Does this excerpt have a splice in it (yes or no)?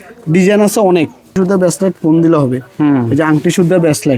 yes